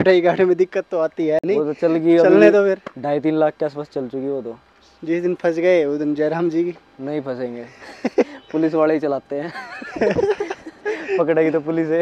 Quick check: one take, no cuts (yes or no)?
yes